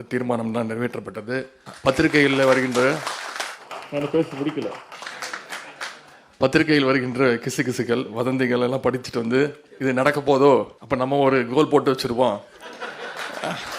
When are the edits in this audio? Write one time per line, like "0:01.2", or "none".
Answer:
0:01.6
0:09.7
0:10.8